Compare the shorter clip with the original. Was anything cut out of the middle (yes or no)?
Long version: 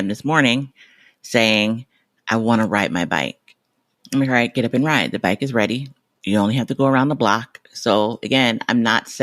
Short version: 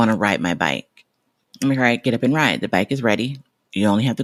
no